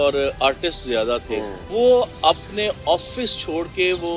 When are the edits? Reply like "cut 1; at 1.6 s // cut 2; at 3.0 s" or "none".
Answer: cut 1; at 1.6 s